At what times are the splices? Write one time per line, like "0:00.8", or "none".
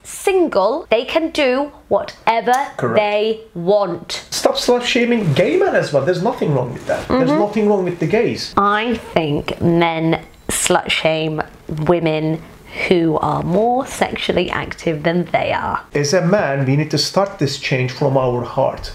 0:00.8
0:04.2
0:08.5
0:15.9